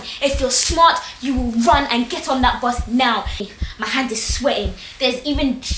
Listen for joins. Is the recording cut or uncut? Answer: cut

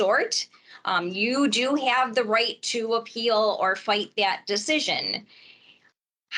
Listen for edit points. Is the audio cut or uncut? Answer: uncut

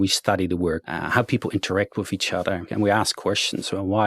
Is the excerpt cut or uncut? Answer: cut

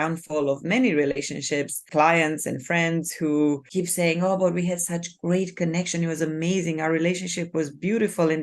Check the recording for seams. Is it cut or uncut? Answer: cut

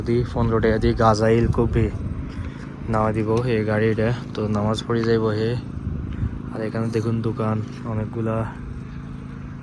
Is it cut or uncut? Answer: uncut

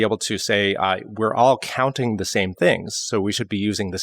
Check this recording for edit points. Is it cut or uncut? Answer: uncut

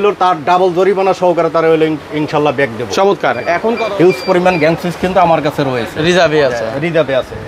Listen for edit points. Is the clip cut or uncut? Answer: cut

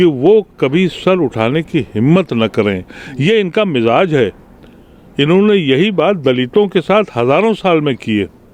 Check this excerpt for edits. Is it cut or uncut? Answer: uncut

